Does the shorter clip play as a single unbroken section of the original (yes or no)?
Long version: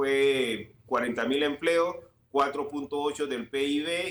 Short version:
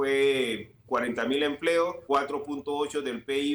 no